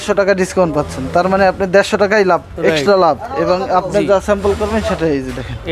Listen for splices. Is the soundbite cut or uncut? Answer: uncut